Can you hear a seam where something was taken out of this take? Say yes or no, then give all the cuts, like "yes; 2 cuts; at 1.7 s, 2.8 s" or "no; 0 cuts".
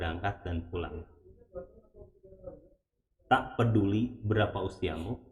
no; 0 cuts